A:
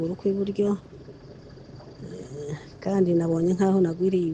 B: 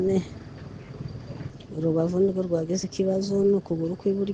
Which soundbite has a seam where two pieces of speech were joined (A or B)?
B